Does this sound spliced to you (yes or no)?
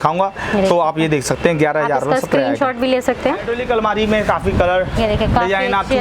yes